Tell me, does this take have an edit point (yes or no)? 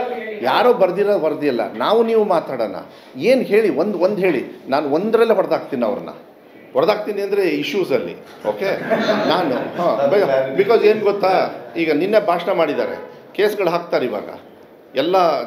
no